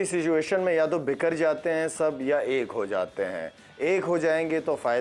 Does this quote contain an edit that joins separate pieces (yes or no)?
no